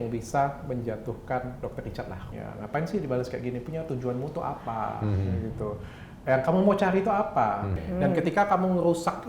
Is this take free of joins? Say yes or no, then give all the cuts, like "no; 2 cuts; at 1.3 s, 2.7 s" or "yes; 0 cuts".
no; 2 cuts; at 2.3 s, 7.8 s